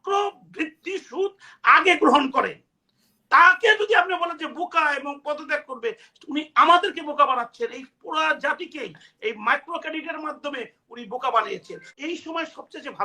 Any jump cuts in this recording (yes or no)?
yes